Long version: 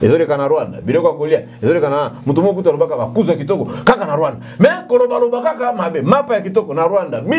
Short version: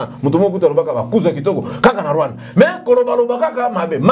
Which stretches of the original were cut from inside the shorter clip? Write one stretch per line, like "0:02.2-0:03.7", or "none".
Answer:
none